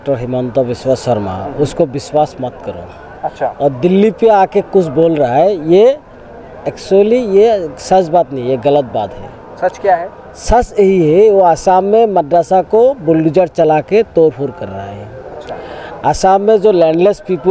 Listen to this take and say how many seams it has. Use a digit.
0